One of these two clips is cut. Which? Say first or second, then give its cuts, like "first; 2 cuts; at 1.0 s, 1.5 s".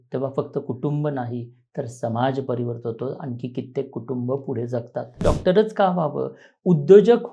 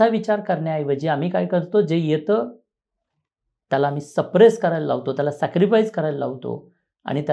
first; 1 cut; at 5.2 s